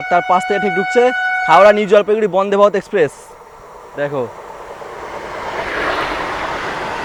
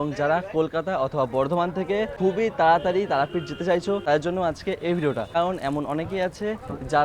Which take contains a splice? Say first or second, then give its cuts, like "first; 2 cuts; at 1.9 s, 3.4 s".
second; 3 cuts; at 2.1 s, 4.0 s, 5.3 s